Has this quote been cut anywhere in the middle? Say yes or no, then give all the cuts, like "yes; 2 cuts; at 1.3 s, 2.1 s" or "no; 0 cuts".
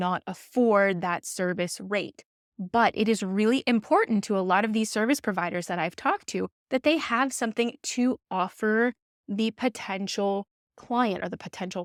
no; 0 cuts